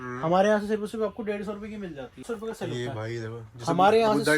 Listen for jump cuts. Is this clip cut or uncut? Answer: cut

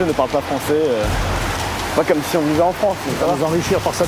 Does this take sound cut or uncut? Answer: cut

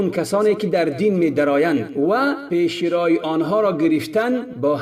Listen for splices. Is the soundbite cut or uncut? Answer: uncut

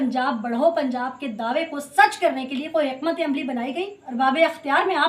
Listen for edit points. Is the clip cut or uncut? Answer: cut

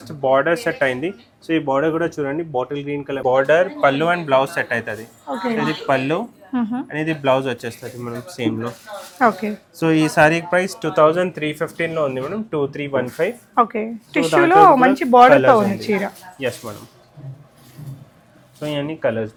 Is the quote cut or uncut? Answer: uncut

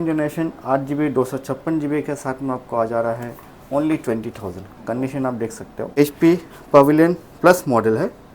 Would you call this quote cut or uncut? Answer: cut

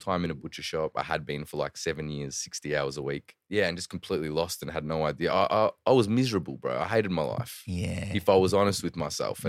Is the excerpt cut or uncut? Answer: cut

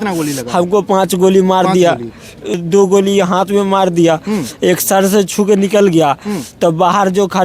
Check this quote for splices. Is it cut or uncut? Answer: cut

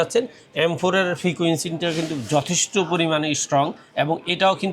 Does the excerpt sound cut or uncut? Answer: uncut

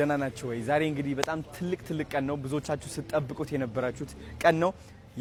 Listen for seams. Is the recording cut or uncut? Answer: uncut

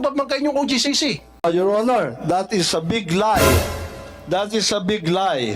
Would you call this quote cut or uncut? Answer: cut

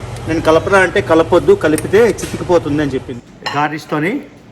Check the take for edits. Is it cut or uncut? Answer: cut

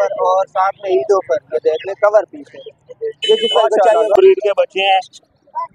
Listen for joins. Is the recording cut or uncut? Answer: cut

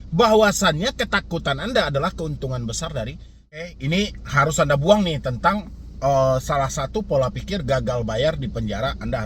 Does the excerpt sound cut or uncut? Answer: cut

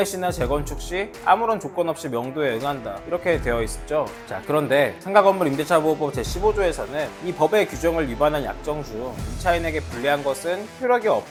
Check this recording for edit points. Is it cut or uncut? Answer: uncut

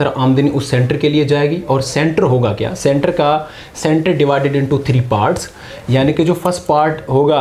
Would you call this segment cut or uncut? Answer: uncut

